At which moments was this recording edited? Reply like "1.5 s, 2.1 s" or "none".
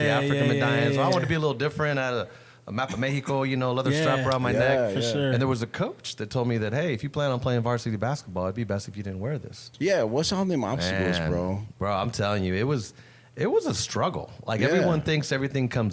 9.7 s